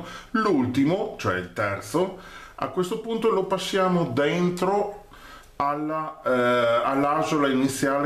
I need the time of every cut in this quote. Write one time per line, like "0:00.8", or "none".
0:01.9